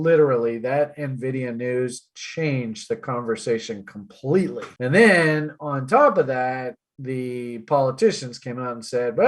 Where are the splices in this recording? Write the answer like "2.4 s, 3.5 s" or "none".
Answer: none